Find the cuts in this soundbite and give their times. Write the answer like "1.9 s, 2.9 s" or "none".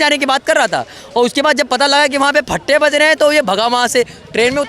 none